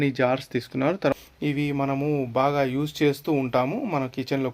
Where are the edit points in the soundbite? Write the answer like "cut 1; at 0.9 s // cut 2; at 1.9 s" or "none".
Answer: cut 1; at 1.1 s